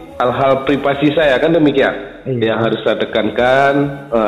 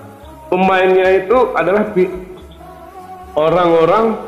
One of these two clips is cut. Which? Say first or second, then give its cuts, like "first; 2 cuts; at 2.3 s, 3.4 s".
first; 1 cut; at 2.1 s